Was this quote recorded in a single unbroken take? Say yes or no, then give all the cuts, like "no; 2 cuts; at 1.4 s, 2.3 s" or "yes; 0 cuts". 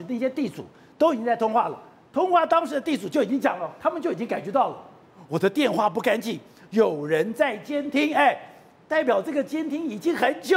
yes; 0 cuts